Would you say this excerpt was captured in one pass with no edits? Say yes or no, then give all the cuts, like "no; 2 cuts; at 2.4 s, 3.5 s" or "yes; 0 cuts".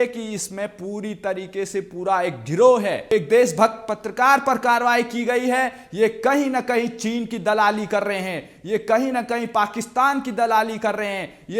no; 1 cut; at 3.1 s